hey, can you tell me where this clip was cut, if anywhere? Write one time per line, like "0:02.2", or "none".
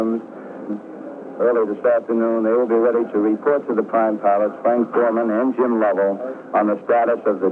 0:04.5